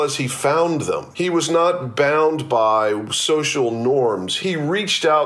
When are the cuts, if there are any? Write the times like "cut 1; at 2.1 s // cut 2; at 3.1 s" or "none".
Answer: cut 1; at 1.1 s // cut 2; at 4.3 s